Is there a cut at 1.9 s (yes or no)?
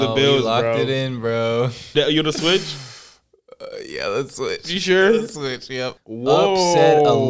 yes